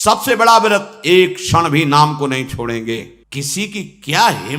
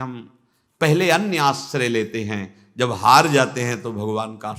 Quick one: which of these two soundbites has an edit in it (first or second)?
first